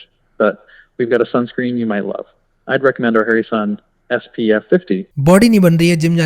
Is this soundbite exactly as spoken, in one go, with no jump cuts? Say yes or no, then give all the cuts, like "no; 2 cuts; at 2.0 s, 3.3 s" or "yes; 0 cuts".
no; 1 cut; at 5.2 s